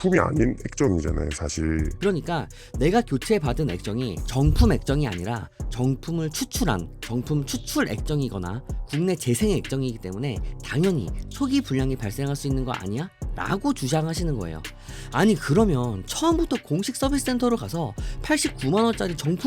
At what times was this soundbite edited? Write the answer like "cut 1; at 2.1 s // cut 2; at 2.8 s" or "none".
cut 1; at 1.9 s